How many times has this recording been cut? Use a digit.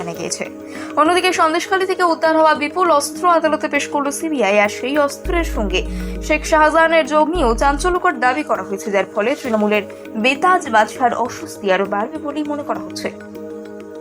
1